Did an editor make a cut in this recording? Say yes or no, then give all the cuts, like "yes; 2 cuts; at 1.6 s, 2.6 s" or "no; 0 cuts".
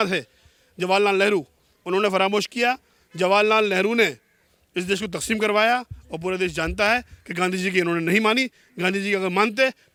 no; 0 cuts